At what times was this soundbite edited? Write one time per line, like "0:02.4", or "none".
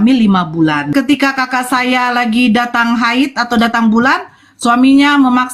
0:00.9